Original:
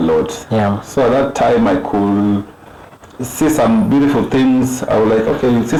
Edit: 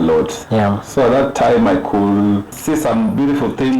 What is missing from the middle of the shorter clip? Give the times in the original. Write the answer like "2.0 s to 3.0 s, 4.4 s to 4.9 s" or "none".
2.5 s to 3.3 s